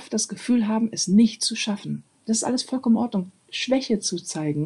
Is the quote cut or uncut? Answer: cut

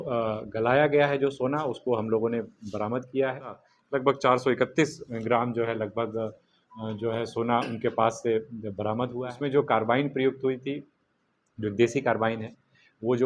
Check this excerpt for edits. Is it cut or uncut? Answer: cut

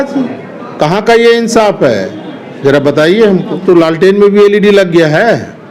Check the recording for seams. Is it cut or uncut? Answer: cut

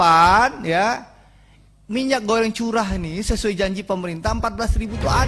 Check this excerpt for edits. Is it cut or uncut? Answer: uncut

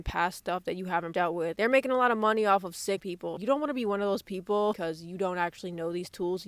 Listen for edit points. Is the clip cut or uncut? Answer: cut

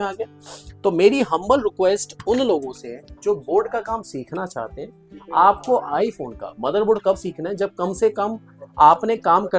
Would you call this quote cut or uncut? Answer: uncut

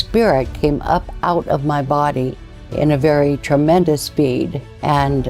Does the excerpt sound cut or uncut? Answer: uncut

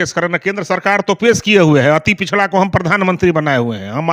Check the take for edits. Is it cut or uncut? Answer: uncut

